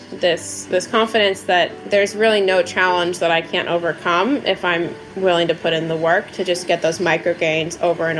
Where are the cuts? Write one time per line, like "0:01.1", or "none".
0:01.8